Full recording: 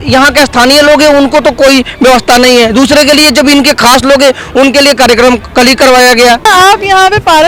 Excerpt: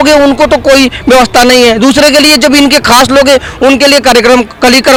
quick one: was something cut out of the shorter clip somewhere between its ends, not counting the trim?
no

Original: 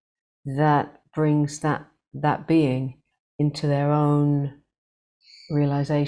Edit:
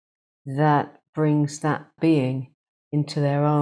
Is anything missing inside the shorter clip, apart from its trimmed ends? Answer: yes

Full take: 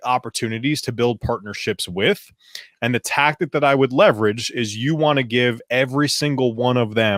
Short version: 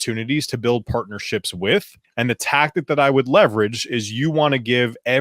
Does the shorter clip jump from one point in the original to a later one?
yes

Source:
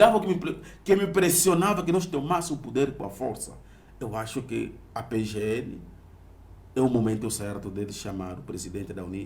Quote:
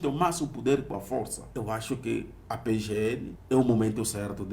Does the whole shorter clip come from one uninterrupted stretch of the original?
no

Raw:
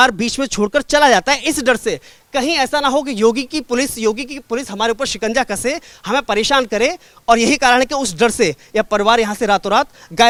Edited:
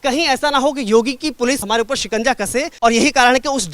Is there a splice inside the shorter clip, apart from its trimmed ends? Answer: yes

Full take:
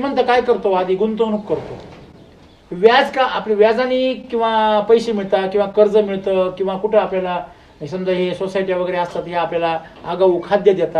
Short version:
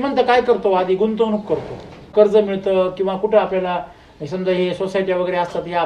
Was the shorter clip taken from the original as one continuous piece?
no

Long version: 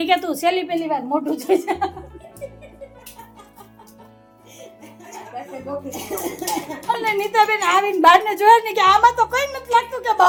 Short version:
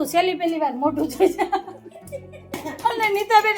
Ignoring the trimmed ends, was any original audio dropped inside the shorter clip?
yes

